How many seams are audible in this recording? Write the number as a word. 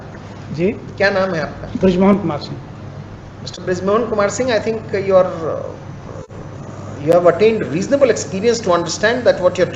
zero